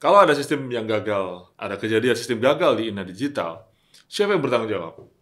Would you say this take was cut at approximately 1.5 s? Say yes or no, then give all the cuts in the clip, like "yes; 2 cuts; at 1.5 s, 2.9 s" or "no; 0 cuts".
yes; 1 cut; at 1.5 s